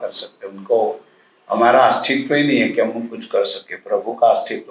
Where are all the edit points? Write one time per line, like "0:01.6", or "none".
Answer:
none